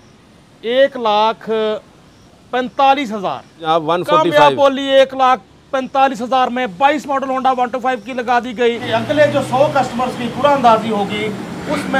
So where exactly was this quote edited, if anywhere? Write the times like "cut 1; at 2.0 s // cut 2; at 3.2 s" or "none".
cut 1; at 3.6 s // cut 2; at 8.8 s

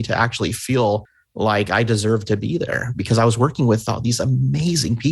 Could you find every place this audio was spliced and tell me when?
cut 1; at 1.2 s

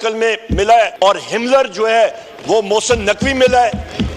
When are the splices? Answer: cut 1; at 0.9 s

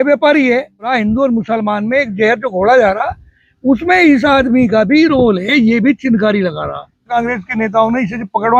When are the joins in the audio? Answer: cut 1; at 0.9 s // cut 2; at 7.1 s

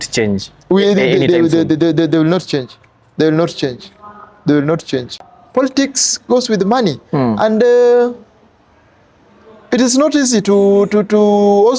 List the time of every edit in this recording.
cut 1; at 5.2 s

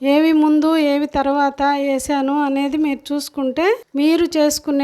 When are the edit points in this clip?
cut 1; at 3.9 s

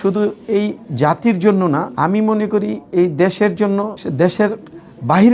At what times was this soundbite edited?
cut 1; at 1.9 s // cut 2; at 4.0 s

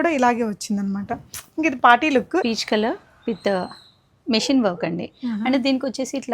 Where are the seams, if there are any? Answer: cut 1; at 2.4 s

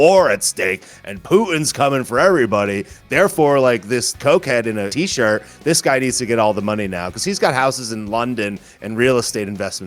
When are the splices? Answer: cut 1; at 4.1 s // cut 2; at 4.9 s

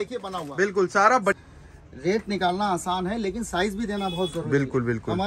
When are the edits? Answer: cut 1; at 1.4 s

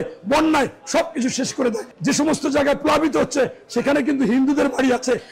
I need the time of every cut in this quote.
cut 1; at 1.9 s

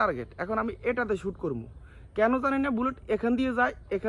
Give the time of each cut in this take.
none

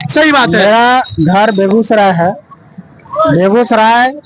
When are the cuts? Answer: none

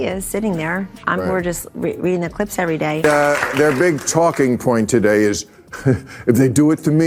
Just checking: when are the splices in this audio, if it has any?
none

